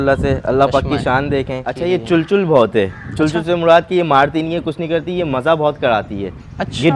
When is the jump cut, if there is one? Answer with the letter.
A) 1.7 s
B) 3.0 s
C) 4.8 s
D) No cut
A